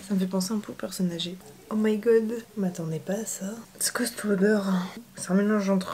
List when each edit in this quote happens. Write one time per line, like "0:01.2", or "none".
0:01.2
0:05.0

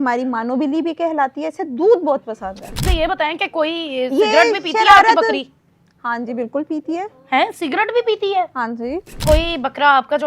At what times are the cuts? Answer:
0:02.8
0:09.2

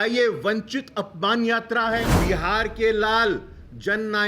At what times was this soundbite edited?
0:02.1

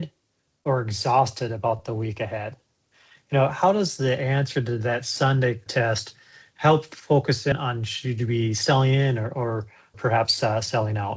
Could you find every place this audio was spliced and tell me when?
0:05.7
0:07.5
0:10.0

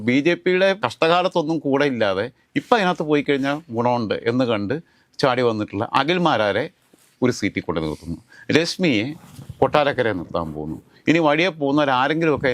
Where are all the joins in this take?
none

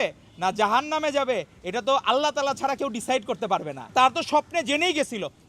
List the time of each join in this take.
0:03.9

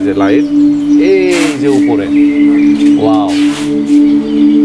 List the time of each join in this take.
none

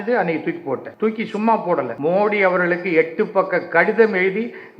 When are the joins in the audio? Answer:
0:00.9
0:01.9

